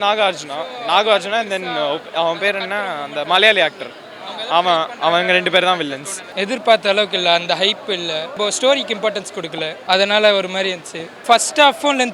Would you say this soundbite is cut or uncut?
cut